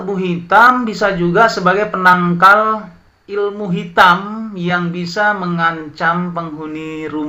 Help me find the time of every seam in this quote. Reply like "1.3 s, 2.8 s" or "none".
none